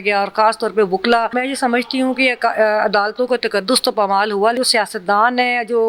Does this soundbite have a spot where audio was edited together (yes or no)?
yes